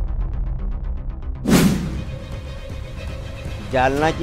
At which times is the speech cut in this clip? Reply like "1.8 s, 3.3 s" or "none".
1.6 s